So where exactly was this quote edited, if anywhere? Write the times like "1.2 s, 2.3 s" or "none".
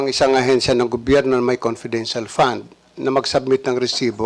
none